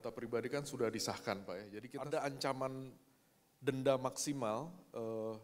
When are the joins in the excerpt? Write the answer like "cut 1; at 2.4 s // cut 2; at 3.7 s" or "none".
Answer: cut 1; at 1.7 s